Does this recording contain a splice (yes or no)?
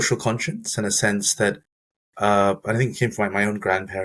no